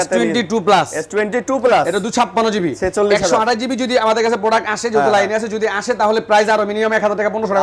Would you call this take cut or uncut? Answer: uncut